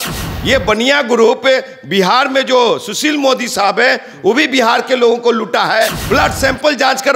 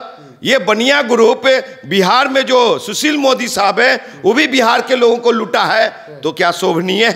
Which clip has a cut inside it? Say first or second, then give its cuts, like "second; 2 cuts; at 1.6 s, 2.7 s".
first; 1 cut; at 6.0 s